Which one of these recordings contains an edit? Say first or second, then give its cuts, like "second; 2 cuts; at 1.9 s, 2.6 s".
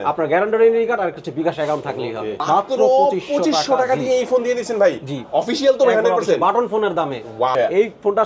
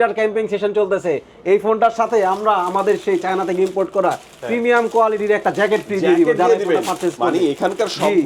first; 2 cuts; at 2.4 s, 7.5 s